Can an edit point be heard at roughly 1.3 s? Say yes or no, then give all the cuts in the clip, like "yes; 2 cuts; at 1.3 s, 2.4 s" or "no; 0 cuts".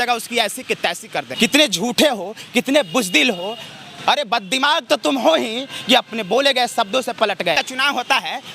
yes; 2 cuts; at 1.3 s, 7.6 s